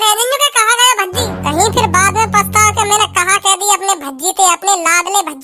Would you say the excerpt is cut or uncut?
cut